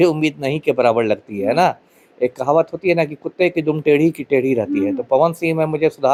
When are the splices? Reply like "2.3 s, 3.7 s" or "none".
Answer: none